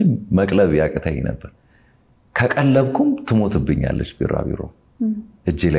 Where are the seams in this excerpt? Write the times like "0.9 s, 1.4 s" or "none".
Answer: 4.8 s